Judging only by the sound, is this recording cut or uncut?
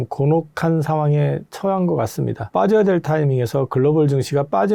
uncut